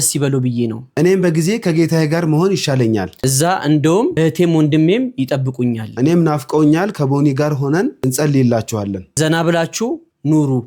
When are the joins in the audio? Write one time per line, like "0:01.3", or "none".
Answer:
none